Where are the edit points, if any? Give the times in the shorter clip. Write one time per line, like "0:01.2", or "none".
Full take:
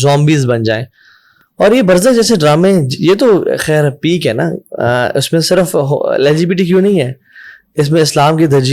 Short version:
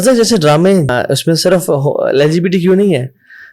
0:00.9